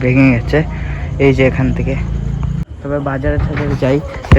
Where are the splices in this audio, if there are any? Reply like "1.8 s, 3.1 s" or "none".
2.6 s